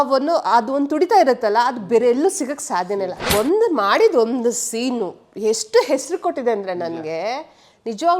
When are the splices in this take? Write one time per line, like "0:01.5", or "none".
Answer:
0:03.3